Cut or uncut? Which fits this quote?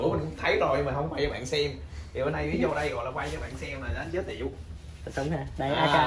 uncut